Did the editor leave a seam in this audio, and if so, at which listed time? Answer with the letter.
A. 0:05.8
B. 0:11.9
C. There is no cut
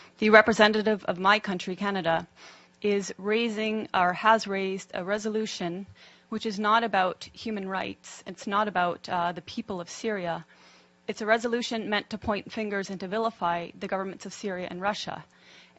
A